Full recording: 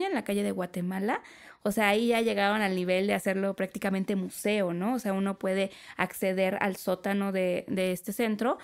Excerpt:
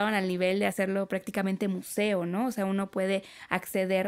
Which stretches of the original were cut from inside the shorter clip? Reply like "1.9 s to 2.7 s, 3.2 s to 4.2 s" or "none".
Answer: none